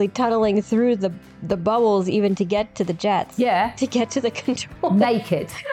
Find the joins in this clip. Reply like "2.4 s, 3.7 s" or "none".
none